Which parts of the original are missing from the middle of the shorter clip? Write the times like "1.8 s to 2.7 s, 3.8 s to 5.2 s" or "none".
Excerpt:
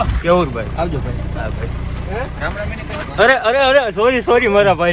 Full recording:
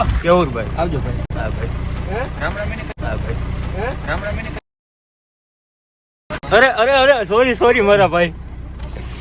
2.9 s to 6.2 s